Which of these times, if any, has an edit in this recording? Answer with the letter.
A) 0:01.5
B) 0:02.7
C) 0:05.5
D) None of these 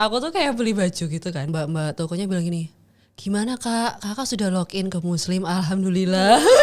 A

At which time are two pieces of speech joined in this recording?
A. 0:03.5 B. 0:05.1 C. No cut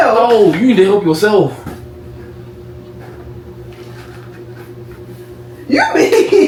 C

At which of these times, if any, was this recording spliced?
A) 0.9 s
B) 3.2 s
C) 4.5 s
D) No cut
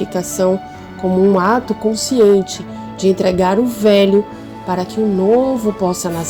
D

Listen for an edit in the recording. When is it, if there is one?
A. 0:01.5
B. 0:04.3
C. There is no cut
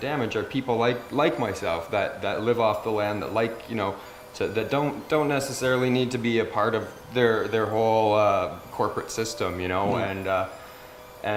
C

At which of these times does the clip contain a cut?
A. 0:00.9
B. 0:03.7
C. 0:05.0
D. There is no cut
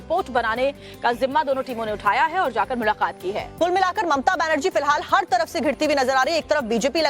C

